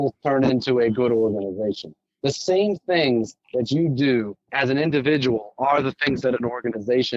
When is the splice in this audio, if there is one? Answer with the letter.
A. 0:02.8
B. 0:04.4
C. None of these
B